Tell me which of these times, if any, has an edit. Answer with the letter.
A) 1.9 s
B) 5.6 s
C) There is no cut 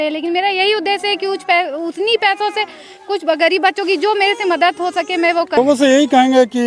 B